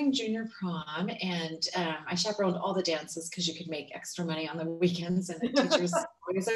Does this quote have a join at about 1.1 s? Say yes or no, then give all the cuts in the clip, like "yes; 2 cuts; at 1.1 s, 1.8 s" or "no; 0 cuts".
no; 0 cuts